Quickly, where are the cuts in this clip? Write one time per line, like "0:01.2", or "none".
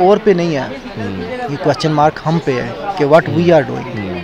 none